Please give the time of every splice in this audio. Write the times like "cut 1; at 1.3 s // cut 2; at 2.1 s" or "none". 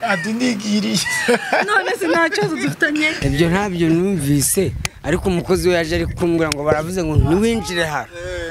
cut 1; at 3.2 s